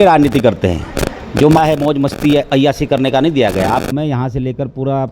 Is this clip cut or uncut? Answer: cut